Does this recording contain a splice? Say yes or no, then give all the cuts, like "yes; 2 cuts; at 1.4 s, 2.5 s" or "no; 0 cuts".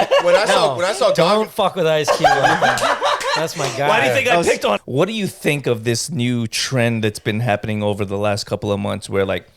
yes; 1 cut; at 4.8 s